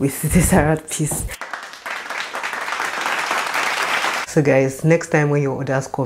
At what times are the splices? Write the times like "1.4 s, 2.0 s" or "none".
4.1 s